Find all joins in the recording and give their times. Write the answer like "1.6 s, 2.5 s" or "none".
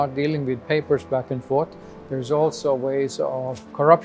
none